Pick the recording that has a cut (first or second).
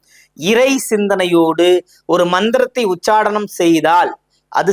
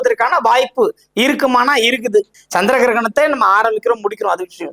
second